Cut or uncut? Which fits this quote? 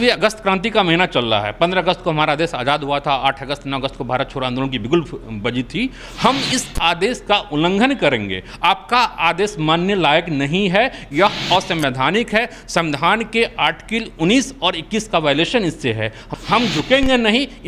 cut